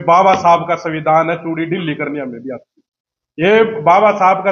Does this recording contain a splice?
no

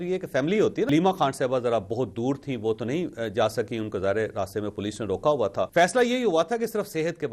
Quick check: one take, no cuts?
no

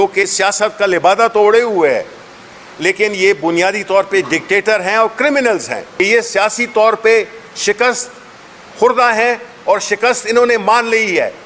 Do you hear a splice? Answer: yes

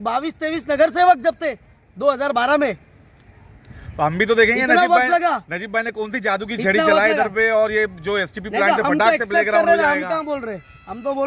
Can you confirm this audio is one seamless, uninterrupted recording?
yes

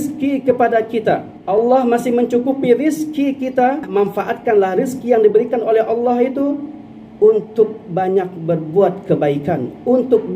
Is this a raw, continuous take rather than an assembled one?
no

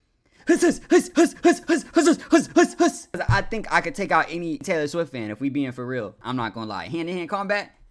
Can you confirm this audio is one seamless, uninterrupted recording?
no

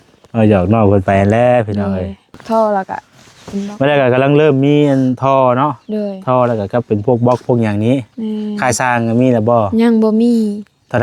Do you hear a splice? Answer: yes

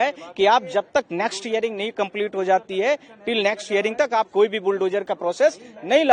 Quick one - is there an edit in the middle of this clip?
no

